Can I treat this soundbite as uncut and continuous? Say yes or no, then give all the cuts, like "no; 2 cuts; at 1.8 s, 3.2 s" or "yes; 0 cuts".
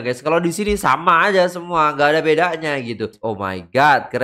no; 1 cut; at 3.2 s